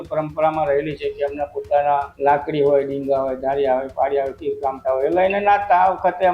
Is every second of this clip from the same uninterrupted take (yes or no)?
no